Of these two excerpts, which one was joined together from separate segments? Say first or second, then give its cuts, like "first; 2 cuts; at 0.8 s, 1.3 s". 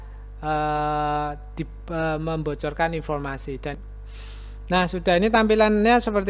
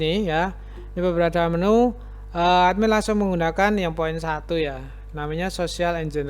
first; 1 cut; at 3.7 s